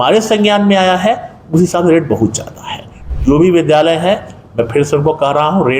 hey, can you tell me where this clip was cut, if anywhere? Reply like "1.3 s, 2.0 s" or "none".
3.0 s

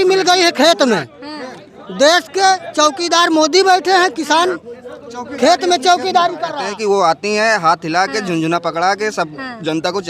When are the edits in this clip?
6.5 s

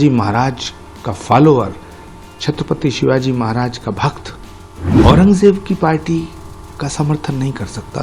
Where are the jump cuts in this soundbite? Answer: 5.0 s

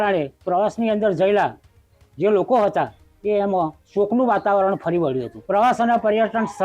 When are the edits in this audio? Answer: 5.3 s

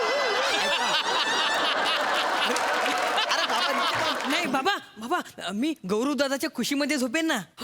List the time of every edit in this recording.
4.2 s

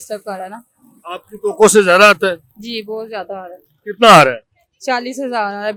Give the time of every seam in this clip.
none

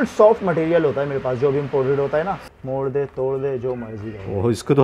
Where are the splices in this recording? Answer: 2.4 s

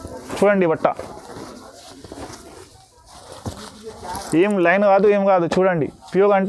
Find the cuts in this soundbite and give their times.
none

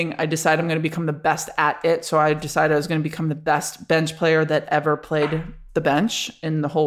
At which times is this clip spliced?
none

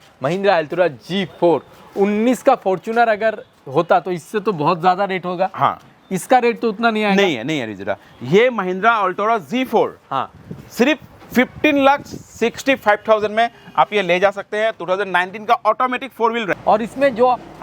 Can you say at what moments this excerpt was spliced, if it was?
16.5 s

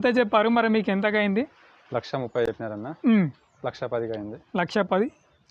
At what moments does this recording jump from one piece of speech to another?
none

